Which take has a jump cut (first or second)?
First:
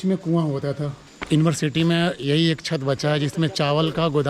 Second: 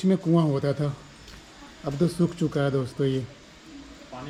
first